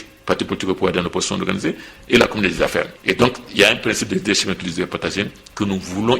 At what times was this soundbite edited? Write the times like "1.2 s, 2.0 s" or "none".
2.9 s